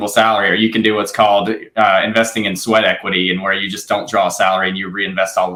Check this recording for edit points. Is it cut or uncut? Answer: uncut